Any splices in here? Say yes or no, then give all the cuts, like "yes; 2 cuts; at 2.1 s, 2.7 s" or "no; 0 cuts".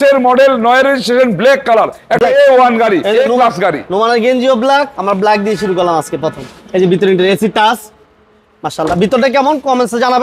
no; 0 cuts